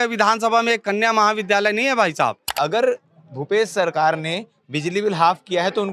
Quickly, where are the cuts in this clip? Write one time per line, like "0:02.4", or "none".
0:02.4